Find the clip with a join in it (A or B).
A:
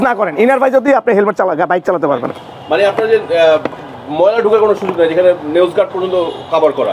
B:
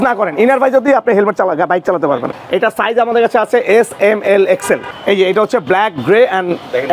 B